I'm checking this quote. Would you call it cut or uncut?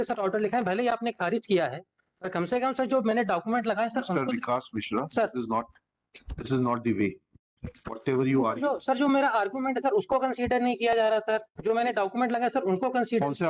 uncut